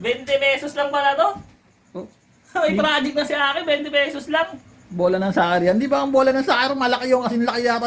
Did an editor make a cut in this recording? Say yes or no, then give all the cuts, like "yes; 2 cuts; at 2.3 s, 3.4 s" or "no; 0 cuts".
no; 0 cuts